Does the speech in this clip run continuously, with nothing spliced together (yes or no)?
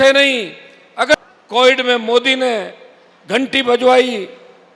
no